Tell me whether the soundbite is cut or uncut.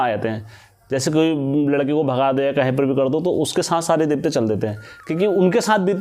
uncut